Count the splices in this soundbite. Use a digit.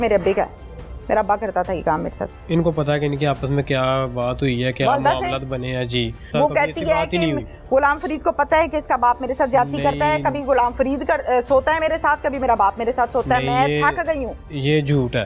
2